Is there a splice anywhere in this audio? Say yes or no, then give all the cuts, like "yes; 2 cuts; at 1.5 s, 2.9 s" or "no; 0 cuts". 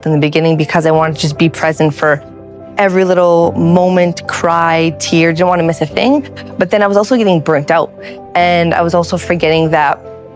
no; 0 cuts